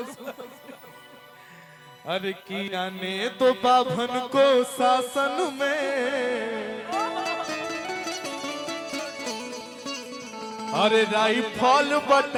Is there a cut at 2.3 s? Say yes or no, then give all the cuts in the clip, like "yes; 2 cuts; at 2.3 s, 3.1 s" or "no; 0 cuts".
no; 0 cuts